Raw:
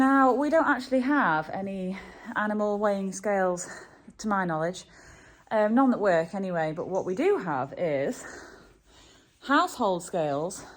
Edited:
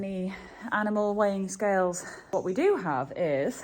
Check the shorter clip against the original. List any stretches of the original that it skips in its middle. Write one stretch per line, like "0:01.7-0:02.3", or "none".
0:03.9-0:06.9